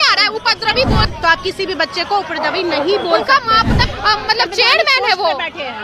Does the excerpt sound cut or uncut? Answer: cut